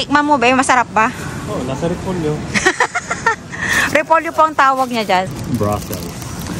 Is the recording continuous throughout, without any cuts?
yes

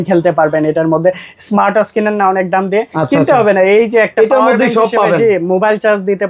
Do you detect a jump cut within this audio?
no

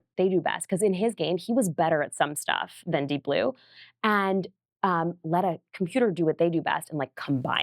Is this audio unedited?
yes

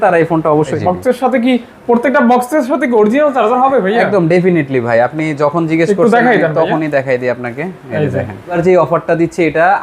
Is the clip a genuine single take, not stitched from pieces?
no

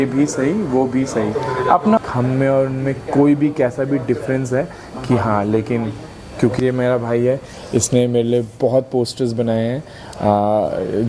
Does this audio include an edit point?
yes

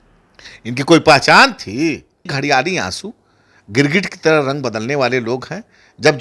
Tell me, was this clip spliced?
yes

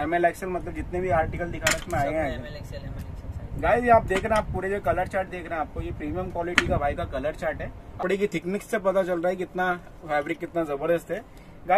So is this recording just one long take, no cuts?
no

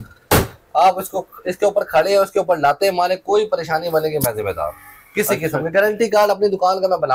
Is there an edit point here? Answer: no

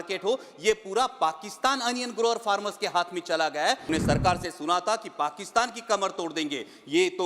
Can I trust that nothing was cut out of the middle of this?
no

